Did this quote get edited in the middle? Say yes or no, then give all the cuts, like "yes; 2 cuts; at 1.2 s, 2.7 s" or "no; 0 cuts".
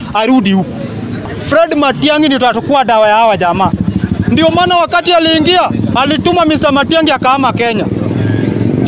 yes; 1 cut; at 1.4 s